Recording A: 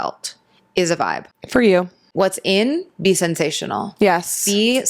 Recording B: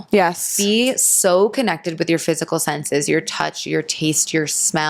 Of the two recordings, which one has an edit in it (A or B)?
A